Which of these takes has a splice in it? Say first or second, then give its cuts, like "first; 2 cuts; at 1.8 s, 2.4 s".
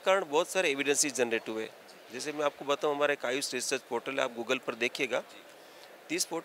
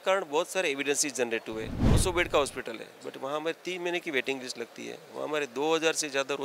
second; 1 cut; at 1.8 s